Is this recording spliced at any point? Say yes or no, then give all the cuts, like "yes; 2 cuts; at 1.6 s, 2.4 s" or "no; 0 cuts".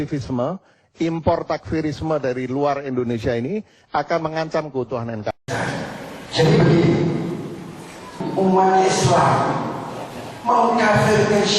yes; 1 cut; at 9.7 s